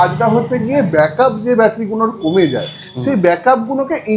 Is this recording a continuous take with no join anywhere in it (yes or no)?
yes